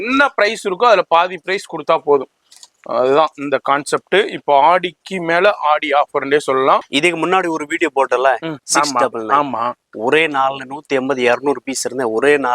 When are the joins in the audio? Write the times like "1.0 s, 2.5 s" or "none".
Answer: 6.9 s